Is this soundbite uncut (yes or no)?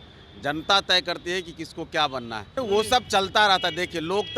no